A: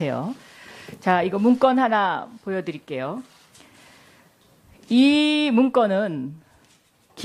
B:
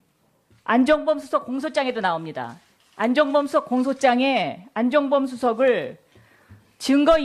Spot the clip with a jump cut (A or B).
A